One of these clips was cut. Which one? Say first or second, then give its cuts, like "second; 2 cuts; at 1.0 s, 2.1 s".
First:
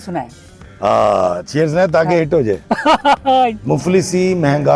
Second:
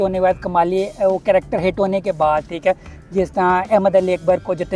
first; 1 cut; at 3.6 s